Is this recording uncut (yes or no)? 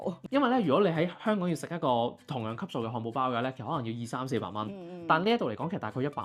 yes